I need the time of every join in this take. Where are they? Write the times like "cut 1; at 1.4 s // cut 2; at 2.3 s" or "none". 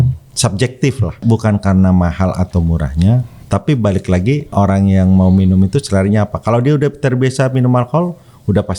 cut 1; at 1.2 s // cut 2; at 3.3 s // cut 3; at 4.5 s